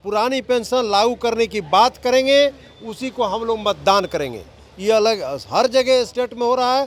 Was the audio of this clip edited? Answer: no; 0 cuts

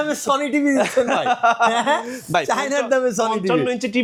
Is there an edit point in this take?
no; 0 cuts

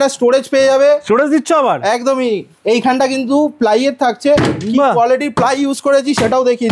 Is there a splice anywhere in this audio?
no; 0 cuts

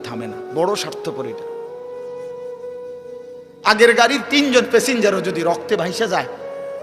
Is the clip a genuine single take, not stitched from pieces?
no; 2 cuts; at 1.2 s, 3.6 s

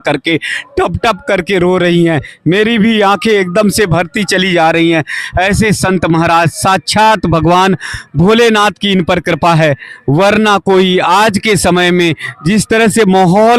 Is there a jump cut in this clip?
no; 0 cuts

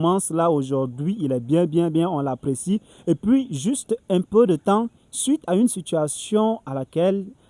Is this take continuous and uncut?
yes; 0 cuts

